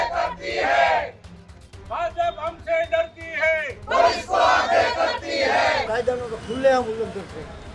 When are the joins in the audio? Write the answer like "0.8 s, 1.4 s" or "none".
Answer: 5.9 s